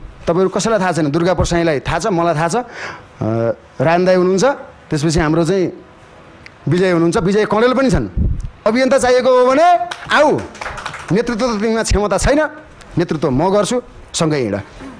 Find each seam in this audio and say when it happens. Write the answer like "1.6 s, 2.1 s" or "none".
8.7 s